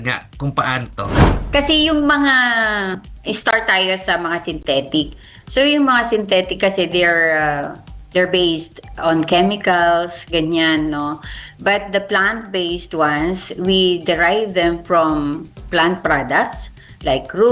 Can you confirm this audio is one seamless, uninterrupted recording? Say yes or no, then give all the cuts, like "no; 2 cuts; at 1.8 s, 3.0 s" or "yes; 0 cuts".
no; 1 cut; at 1.3 s